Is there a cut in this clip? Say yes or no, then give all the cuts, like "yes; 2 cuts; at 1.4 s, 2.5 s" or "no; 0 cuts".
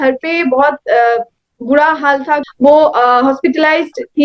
yes; 1 cut; at 2.5 s